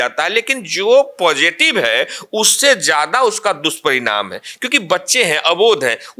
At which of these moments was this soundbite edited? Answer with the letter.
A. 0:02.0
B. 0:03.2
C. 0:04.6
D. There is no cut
D